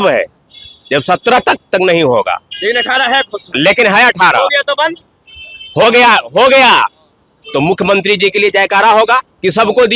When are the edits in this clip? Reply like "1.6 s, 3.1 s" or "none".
none